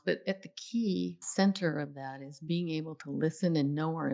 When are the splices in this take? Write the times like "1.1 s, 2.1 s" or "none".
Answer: 1.3 s